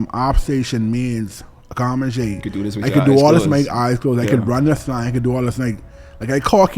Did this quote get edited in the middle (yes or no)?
no